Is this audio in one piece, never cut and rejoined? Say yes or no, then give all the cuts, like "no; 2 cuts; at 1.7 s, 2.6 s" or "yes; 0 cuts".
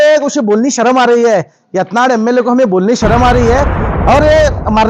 no; 1 cut; at 3.8 s